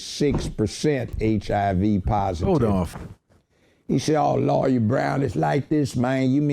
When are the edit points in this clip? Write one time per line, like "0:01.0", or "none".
0:02.9